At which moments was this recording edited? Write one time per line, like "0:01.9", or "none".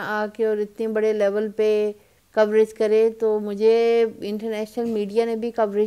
none